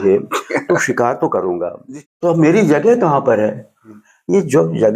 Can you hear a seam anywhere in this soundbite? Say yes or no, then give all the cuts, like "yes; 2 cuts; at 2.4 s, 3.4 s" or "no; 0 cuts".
yes; 1 cut; at 1.7 s